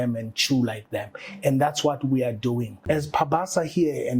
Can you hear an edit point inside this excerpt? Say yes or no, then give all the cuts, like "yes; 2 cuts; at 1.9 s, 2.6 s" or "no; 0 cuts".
yes; 1 cut; at 2.8 s